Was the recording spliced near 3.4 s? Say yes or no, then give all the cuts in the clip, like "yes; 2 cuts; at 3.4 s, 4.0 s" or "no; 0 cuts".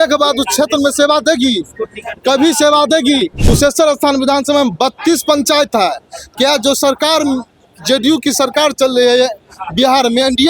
yes; 1 cut; at 3.4 s